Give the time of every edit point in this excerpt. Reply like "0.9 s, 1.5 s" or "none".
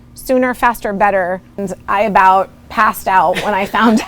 1.6 s

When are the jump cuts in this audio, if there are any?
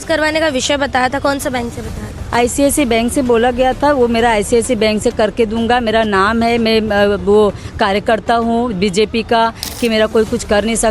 9.6 s

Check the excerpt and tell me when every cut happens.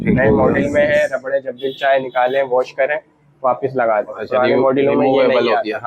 none

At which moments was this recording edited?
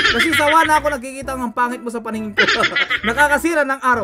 none

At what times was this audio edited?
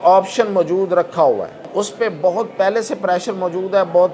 1.6 s

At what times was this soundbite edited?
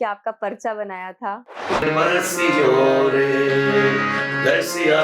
1.9 s

